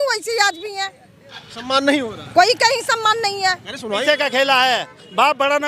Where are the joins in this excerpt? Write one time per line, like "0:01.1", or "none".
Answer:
0:04.0